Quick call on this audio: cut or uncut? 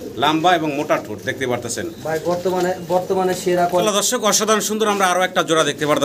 cut